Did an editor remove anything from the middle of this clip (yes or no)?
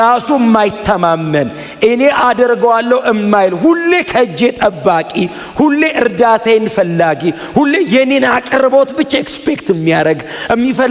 no